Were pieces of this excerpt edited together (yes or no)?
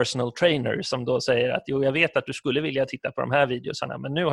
no